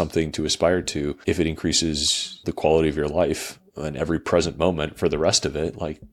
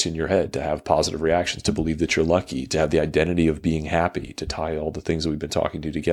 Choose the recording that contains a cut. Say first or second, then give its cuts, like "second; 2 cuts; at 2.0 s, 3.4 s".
first; 2 cuts; at 1.2 s, 2.4 s